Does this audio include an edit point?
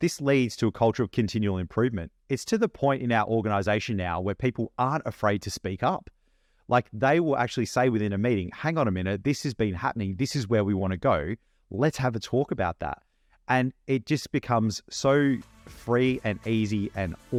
no; 0 cuts

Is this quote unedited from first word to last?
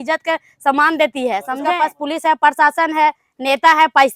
no; 1 cut; at 1.6 s

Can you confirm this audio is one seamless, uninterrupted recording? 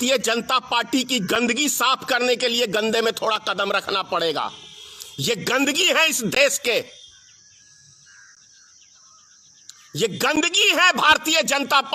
yes; 0 cuts

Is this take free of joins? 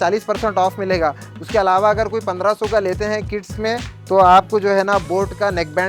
yes; 0 cuts

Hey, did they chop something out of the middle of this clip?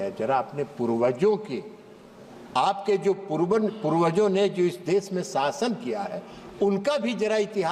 no; 0 cuts

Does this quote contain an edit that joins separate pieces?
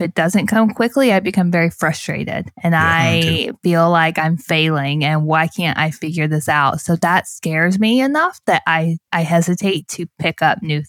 yes; 2 cuts; at 2.4 s, 9.0 s

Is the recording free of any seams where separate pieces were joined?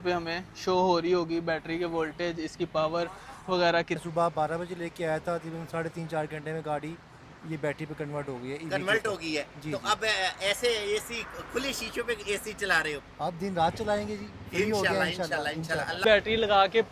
no; 2 cuts; at 4.0 s, 16.0 s

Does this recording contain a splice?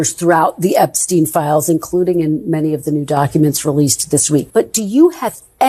yes; 1 cut; at 4.5 s

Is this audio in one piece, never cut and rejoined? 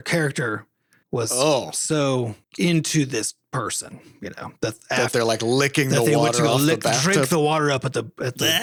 yes; 0 cuts

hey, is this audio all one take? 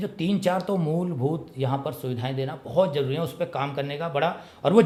yes; 0 cuts

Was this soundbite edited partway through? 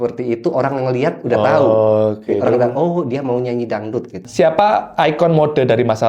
yes; 1 cut; at 4.2 s

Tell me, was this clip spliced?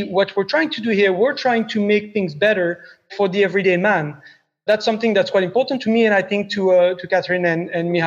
yes; 4 cuts; at 3.1 s, 4.6 s, 5.8 s, 7.0 s

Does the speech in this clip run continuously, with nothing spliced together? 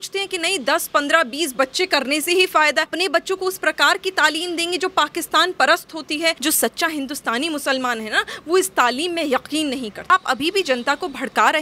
no; 3 cuts; at 2.9 s, 6.4 s, 10.1 s

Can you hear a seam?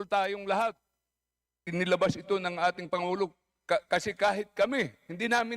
yes; 1 cut; at 1.6 s

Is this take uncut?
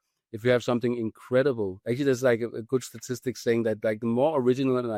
yes; 0 cuts

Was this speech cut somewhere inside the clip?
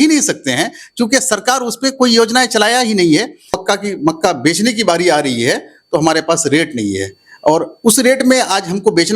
yes; 1 cut; at 3.6 s

